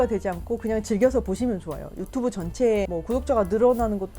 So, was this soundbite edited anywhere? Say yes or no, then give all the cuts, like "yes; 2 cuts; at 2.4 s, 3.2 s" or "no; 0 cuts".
yes; 1 cut; at 2.9 s